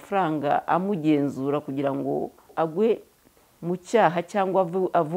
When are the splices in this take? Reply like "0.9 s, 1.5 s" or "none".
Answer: 2.5 s